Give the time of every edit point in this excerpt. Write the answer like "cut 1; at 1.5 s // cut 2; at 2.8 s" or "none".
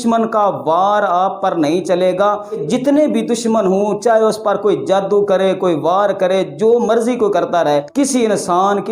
cut 1; at 2.6 s // cut 2; at 7.9 s